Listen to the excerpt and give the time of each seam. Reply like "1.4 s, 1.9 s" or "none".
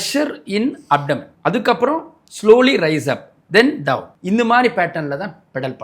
1.3 s, 4.1 s